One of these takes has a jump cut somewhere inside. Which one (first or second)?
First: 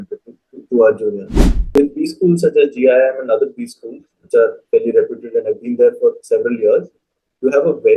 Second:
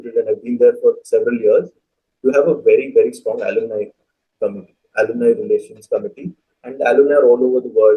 first